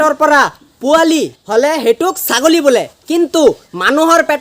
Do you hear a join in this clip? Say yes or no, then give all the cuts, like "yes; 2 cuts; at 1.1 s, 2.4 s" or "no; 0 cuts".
yes; 1 cut; at 1.4 s